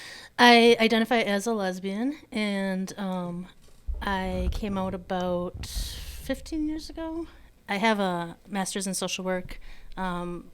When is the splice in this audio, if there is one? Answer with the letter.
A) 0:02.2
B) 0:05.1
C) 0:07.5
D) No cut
C